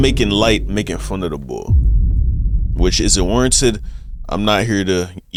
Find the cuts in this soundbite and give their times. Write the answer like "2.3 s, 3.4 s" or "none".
none